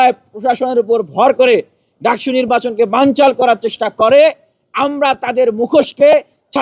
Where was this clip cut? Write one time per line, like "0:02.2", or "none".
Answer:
none